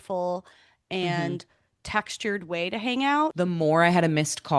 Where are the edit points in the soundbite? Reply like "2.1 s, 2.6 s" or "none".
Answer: 3.3 s